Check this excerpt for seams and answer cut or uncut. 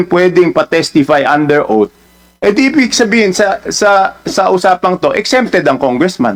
uncut